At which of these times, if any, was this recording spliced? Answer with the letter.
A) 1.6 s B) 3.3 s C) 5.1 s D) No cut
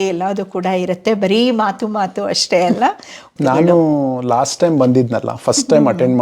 B